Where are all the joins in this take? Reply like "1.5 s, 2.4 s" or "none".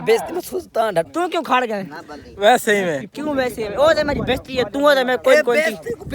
1.1 s